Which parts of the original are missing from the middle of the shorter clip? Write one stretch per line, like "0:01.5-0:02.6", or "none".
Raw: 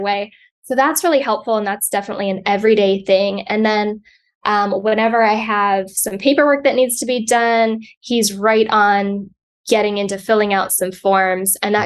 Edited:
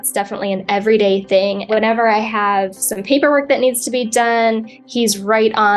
0:03.4-0:04.8